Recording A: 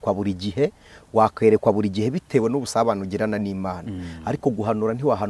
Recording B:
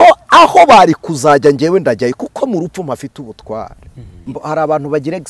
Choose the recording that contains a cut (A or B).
B